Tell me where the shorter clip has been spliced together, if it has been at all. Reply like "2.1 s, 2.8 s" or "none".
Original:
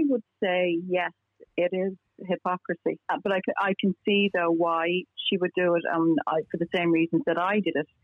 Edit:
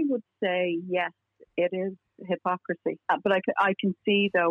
none

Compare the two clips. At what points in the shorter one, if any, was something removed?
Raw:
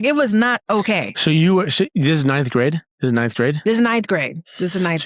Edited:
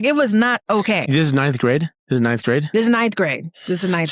1.1 s

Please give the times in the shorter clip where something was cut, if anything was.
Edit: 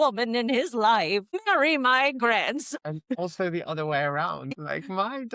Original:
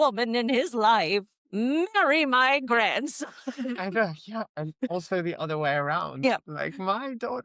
1.4 s, 2.8 s, 4.5 s

